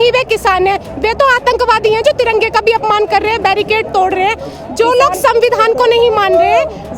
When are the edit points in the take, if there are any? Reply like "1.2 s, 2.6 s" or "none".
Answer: none